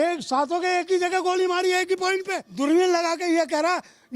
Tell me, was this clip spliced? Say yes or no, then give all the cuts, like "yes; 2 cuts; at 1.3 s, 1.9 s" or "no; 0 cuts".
yes; 1 cut; at 2.4 s